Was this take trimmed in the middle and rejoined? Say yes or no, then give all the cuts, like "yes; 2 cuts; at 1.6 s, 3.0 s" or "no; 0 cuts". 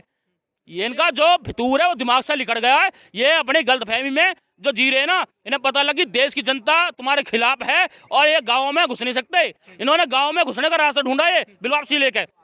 no; 0 cuts